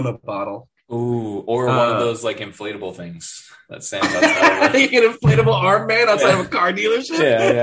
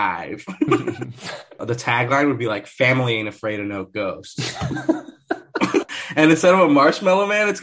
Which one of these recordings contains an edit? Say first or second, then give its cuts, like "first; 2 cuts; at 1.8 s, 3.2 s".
second; 2 cuts; at 1.6 s, 6.0 s